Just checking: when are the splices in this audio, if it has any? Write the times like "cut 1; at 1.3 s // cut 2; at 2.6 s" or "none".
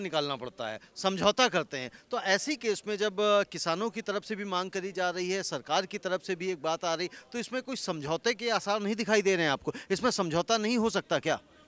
none